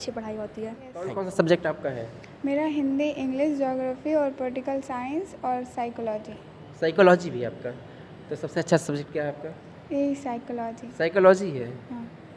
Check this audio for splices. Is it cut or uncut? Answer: uncut